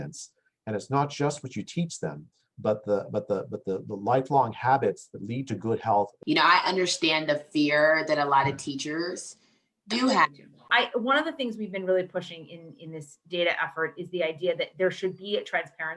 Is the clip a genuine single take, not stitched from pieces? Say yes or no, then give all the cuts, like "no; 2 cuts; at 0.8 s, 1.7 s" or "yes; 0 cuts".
no; 2 cuts; at 6.2 s, 10.7 s